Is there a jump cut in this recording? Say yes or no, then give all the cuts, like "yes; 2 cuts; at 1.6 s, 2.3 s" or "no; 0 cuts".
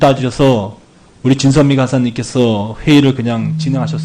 no; 0 cuts